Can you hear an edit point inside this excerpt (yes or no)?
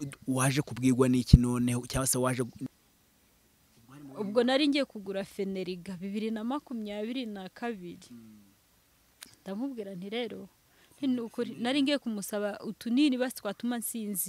yes